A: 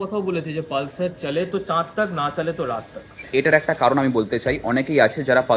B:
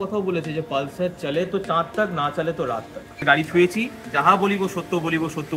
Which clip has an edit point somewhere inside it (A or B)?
B